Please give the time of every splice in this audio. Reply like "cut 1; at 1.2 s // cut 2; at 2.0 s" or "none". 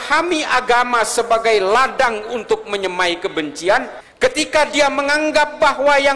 cut 1; at 4.0 s